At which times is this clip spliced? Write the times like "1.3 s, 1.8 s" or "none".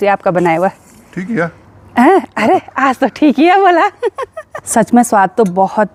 none